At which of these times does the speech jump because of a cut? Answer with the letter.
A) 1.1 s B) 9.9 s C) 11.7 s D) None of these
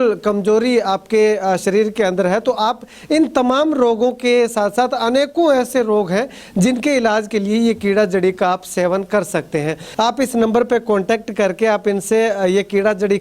B